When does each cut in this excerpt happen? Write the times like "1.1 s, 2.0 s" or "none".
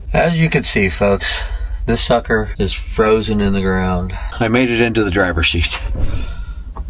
none